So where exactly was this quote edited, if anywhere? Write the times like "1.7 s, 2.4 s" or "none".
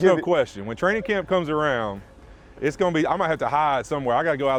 none